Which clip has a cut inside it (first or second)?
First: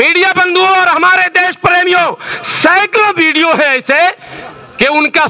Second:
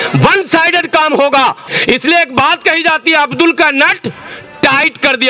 second